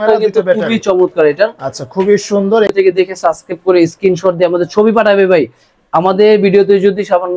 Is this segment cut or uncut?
cut